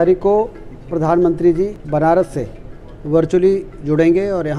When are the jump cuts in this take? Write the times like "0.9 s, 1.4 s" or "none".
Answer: 1.8 s